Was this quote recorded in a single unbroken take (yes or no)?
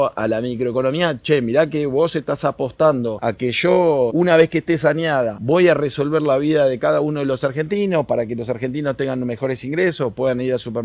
no